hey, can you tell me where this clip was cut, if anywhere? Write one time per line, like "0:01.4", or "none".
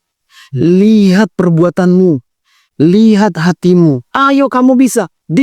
0:04.1